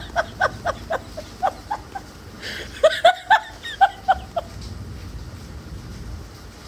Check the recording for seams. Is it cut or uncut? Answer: uncut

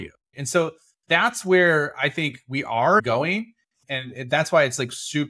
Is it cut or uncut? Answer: cut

